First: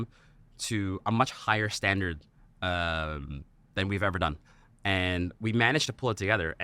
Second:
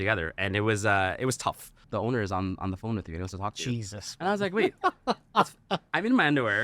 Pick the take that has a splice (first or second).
second